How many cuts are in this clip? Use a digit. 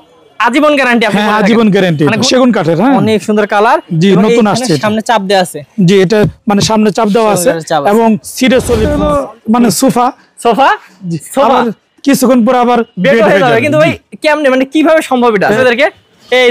3